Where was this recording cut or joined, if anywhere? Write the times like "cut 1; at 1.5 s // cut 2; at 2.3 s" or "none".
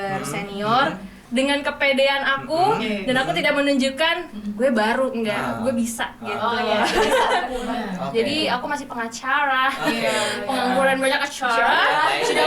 cut 1; at 1.2 s // cut 2; at 7.6 s